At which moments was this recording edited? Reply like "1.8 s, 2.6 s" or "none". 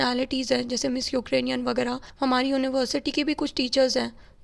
2.1 s